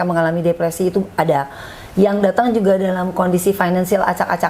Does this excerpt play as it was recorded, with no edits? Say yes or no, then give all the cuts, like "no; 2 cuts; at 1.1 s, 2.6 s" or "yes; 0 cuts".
yes; 0 cuts